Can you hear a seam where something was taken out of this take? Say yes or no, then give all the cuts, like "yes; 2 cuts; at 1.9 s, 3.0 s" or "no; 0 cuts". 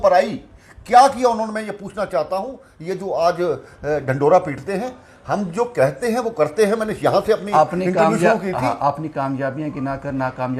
no; 0 cuts